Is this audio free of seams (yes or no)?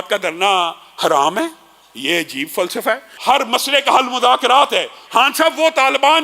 no